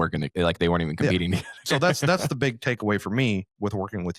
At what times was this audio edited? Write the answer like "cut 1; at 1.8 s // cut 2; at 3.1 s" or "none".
none

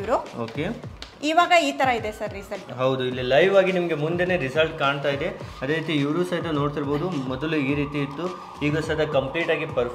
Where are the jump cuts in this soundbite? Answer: none

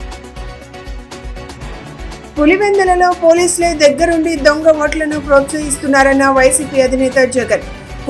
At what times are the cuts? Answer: cut 1; at 1.7 s

